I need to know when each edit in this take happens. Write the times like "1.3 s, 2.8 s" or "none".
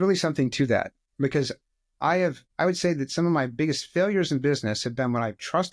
1.0 s, 2.4 s

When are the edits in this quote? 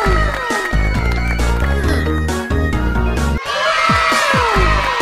3.3 s

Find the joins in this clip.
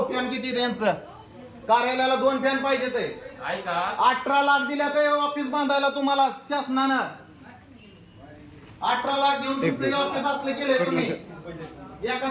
none

